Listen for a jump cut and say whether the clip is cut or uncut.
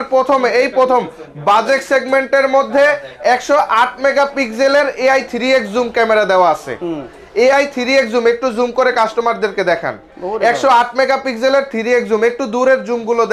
uncut